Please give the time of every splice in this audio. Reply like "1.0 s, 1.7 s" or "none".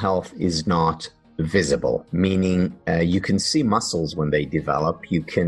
none